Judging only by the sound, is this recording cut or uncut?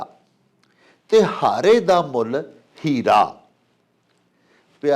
uncut